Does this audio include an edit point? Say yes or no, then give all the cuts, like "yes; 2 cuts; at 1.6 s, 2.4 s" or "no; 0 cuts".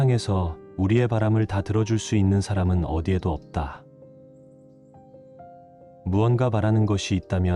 yes; 2 cuts; at 3.8 s, 5.5 s